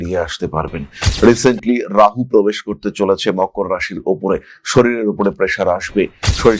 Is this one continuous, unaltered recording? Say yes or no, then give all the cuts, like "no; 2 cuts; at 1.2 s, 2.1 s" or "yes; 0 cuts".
no; 1 cut; at 1.0 s